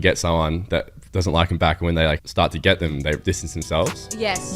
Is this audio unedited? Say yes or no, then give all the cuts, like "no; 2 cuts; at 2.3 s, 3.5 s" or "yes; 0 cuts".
no; 2 cuts; at 2.2 s, 3.2 s